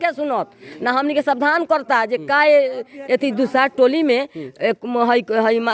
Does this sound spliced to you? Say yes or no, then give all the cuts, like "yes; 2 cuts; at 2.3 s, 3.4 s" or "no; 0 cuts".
no; 0 cuts